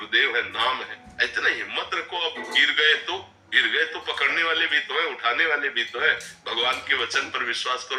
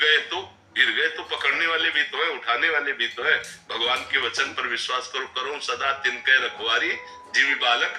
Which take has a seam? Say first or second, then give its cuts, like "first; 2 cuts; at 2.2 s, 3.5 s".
first; 1 cut; at 1.0 s